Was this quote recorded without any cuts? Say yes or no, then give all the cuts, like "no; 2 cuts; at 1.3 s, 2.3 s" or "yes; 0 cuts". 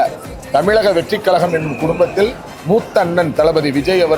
yes; 0 cuts